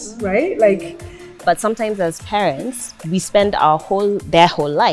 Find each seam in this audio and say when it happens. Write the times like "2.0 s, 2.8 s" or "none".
1.4 s